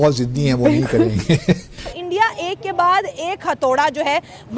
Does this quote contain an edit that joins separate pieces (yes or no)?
yes